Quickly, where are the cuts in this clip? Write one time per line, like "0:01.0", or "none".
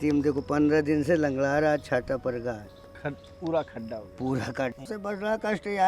0:04.8